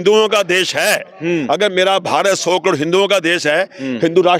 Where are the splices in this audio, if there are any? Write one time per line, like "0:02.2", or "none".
none